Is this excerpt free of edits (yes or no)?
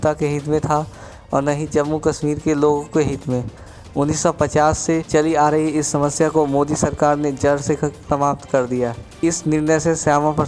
no